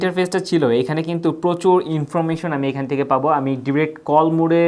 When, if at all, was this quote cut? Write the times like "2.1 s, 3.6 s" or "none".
none